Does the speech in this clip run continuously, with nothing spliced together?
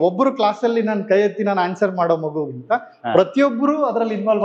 yes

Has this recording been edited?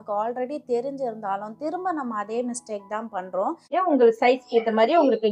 yes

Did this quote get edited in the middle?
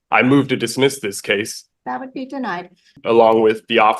yes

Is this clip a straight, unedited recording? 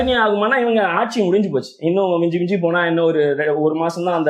yes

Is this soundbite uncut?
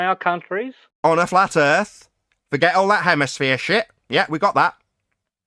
yes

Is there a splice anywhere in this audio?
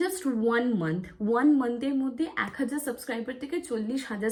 no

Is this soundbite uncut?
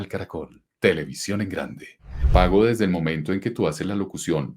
no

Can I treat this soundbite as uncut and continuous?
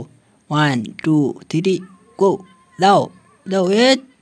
yes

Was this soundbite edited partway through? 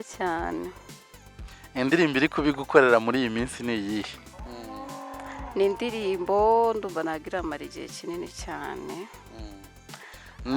yes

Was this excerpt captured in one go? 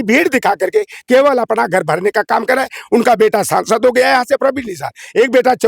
yes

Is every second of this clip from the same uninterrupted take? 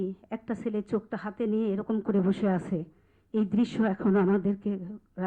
yes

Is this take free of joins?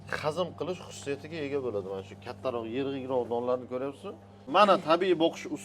no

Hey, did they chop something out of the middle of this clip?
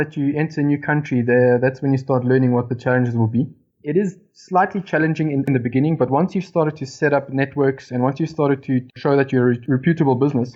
yes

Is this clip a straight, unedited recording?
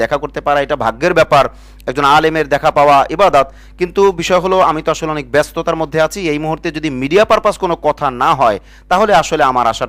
yes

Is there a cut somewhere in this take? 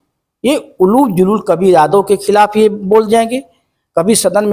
no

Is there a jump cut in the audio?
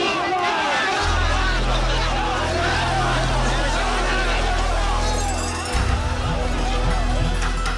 no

